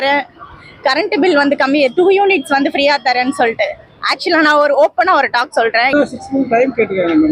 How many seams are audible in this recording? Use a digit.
1